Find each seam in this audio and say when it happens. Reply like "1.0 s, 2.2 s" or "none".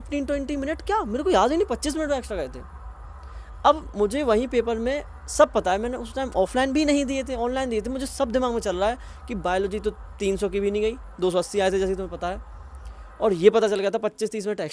none

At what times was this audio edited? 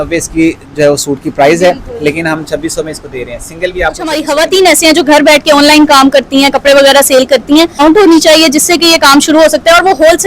4.2 s, 7.8 s

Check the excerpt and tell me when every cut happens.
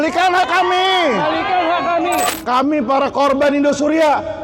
2.3 s

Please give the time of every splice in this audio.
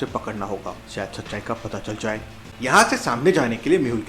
2.4 s

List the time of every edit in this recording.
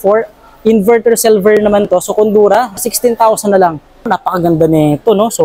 2.8 s, 4.1 s

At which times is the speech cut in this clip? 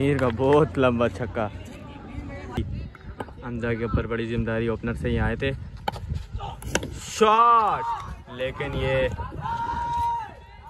2.6 s

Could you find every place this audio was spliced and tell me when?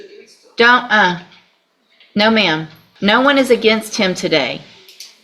2.8 s

